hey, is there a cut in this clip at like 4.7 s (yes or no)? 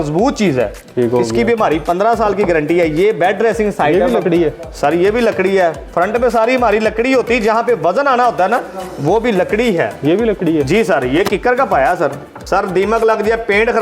no